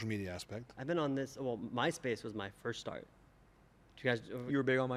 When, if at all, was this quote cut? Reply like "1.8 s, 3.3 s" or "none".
none